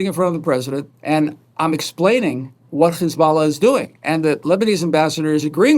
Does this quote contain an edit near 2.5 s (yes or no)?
no